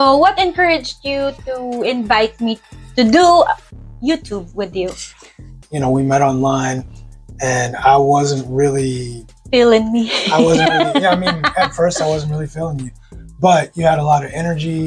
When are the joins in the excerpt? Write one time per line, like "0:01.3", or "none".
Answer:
0:05.6